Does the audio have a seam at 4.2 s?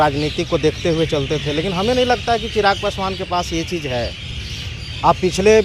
no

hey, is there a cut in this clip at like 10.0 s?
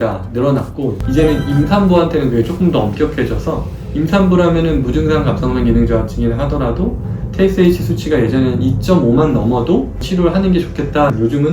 yes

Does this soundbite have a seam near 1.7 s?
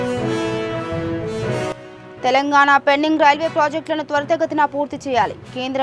yes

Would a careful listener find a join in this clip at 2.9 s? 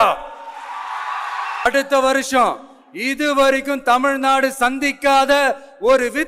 no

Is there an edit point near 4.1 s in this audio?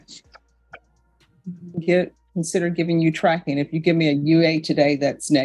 no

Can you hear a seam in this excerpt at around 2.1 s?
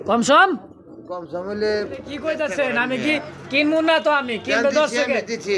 yes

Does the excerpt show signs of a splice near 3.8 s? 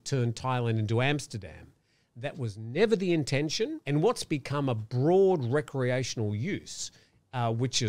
yes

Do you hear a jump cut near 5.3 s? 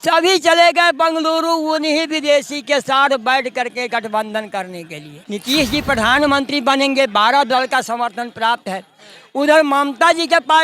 yes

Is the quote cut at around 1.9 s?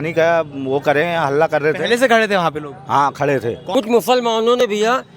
no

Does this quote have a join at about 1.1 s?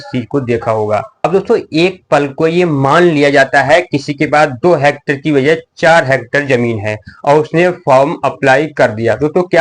yes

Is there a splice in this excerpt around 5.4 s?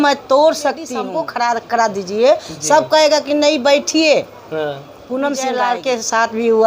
yes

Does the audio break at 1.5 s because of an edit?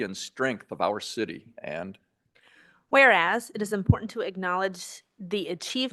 no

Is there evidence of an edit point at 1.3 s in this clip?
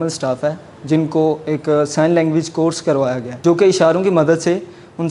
no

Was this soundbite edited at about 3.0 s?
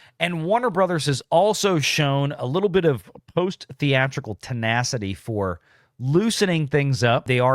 no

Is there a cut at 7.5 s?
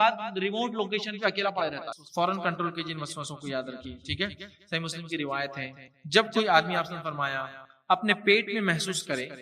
no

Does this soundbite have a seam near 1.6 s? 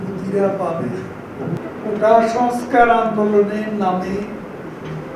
yes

